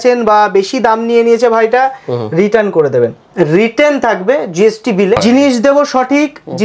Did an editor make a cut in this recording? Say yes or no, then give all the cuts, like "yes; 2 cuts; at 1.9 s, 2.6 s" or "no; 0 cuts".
yes; 2 cuts; at 3.2 s, 5.2 s